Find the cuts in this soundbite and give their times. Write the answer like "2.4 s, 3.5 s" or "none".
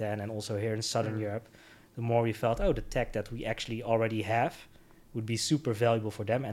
none